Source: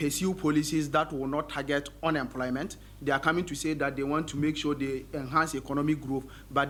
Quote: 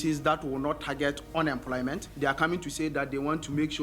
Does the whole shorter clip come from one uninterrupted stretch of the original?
no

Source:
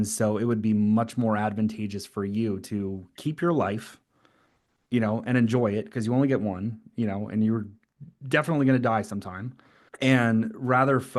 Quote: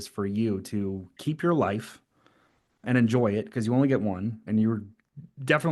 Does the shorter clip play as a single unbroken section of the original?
no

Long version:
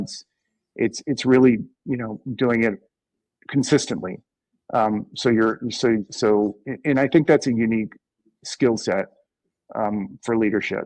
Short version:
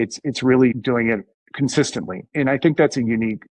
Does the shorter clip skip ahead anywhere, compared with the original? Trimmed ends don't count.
yes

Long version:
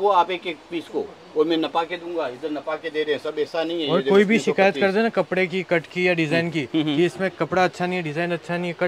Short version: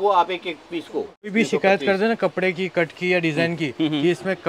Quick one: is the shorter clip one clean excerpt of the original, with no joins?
no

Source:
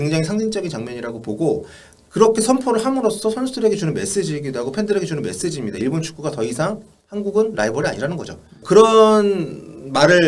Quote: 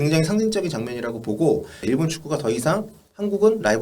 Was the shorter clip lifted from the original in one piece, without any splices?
no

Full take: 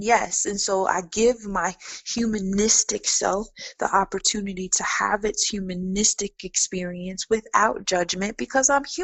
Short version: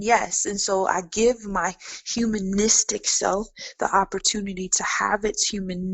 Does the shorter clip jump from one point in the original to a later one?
no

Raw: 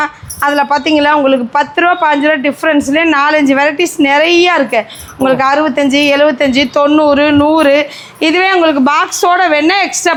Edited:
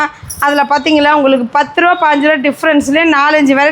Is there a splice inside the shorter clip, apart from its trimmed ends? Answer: no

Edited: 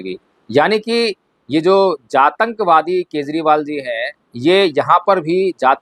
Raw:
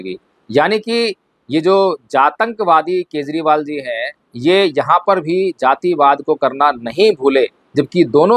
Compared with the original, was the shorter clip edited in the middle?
no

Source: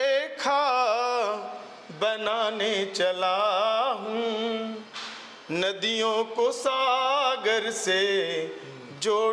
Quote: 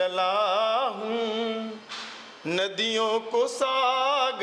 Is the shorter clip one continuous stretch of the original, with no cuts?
yes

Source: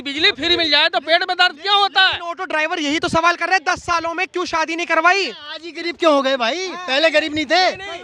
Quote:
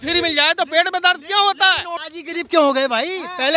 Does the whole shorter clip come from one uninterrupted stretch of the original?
no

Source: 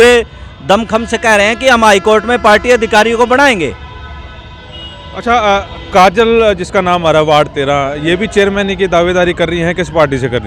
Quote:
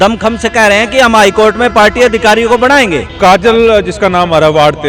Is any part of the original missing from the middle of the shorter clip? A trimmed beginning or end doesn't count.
yes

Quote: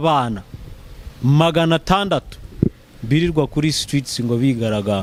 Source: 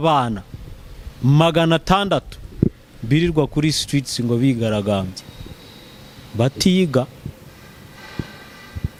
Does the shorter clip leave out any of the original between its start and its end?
no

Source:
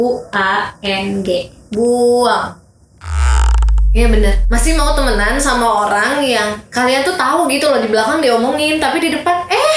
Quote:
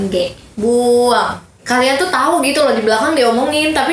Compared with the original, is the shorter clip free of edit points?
no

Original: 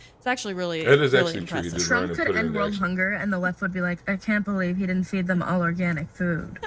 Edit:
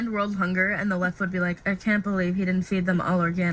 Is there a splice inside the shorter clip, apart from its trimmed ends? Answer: no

